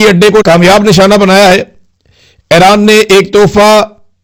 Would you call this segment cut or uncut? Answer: uncut